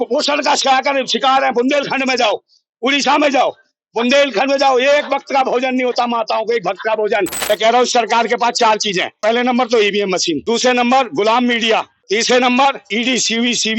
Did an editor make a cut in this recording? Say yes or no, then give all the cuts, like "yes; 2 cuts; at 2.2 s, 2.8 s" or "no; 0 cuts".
yes; 5 cuts; at 7.4 s, 9.2 s, 10.4 s, 11.9 s, 12.9 s